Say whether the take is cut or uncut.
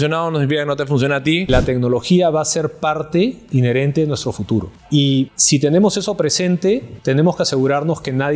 cut